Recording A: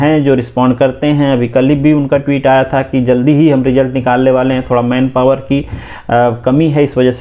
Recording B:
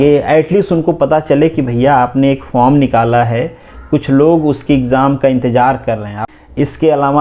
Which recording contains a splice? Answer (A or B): B